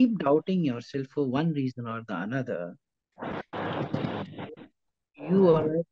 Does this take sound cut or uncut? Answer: uncut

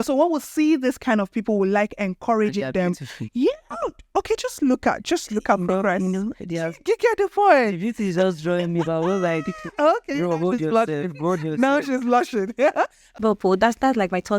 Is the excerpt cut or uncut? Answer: cut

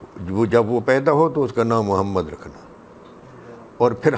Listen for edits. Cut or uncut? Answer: uncut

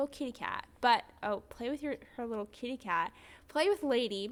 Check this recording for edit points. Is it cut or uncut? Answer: uncut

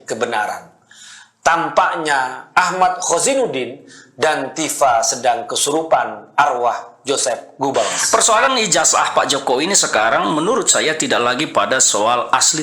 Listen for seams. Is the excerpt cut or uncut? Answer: cut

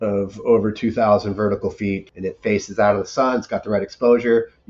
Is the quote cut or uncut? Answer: cut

